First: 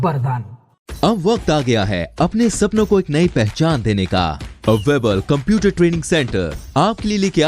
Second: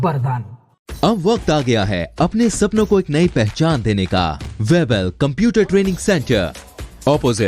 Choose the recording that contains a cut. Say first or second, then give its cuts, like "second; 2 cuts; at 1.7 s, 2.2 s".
second; 1 cut; at 4.4 s